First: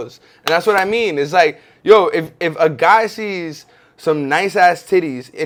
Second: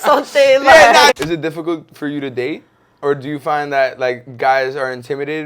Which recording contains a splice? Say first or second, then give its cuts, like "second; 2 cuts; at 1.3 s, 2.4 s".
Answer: second; 1 cut; at 1.1 s